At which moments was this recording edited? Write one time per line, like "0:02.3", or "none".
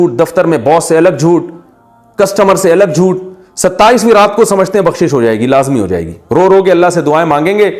none